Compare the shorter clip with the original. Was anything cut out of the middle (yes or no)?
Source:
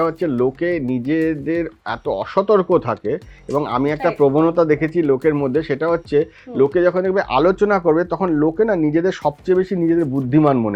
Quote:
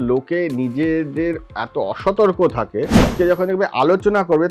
yes